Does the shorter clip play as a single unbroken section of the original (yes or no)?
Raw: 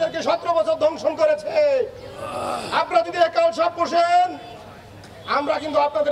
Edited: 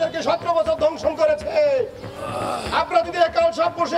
yes